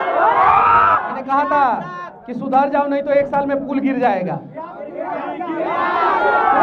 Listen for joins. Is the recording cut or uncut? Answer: cut